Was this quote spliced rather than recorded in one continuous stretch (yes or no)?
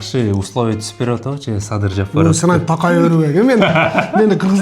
no